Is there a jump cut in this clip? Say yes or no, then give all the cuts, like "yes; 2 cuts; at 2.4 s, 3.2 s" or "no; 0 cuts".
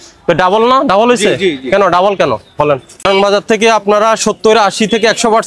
yes; 1 cut; at 3.0 s